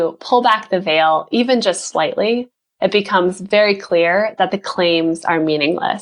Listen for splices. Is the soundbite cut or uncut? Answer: uncut